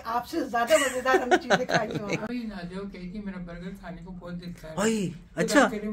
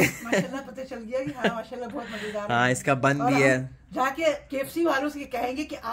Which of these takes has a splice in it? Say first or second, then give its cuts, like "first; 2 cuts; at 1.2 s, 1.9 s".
first; 1 cut; at 2.3 s